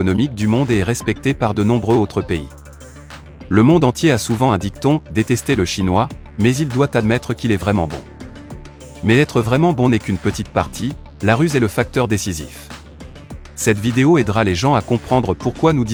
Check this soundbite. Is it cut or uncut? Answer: uncut